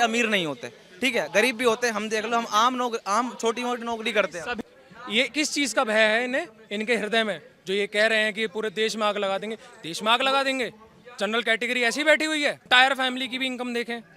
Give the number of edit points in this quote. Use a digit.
2